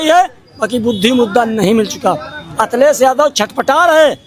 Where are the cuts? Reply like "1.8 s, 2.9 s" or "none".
none